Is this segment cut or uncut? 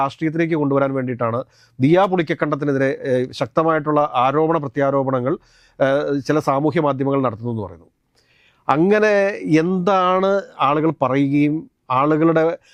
uncut